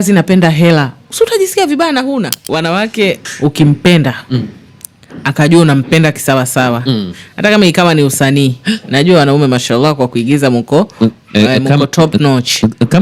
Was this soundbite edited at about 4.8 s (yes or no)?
no